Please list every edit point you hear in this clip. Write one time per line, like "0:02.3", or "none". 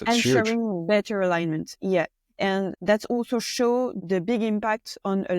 0:02.8